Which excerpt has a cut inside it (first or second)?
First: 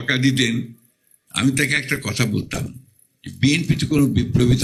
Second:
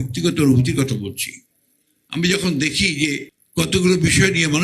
second